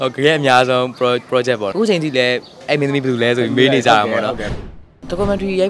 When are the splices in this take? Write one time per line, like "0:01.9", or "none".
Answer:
0:01.7
0:04.6